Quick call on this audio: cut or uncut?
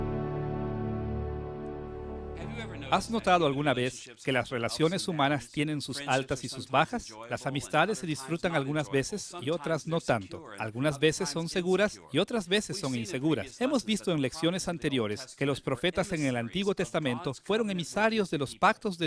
uncut